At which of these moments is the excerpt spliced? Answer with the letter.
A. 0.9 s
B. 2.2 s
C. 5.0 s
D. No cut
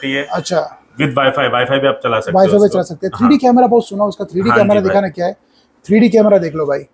D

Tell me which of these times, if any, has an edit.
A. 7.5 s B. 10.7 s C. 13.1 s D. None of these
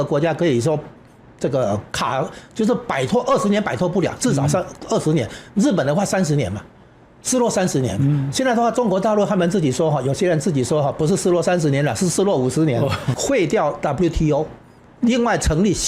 C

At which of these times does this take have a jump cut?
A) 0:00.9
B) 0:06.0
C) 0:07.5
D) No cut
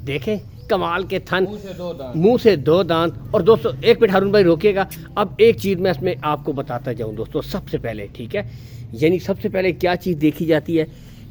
D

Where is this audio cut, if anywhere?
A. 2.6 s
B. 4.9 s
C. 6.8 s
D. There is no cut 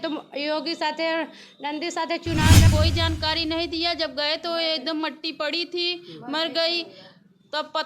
A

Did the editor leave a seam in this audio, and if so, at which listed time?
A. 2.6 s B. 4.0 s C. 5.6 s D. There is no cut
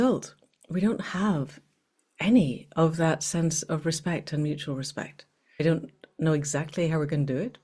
C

